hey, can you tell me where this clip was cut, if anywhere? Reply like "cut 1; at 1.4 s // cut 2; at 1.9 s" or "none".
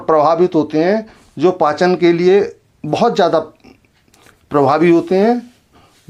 none